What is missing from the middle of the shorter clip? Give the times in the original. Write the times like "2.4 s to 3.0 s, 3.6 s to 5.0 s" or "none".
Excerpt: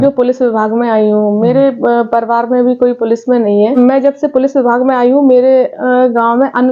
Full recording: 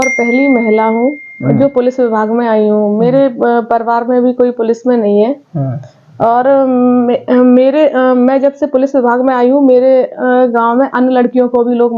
5.3 s to 8.1 s